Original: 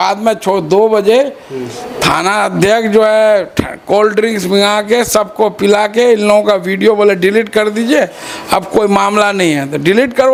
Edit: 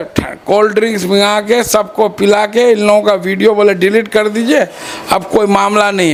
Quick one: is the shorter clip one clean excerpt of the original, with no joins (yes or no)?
yes